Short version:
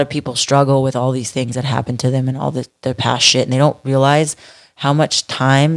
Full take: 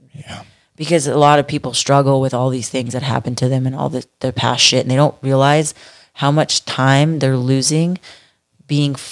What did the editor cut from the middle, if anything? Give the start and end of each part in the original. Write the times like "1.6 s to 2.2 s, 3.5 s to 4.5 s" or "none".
none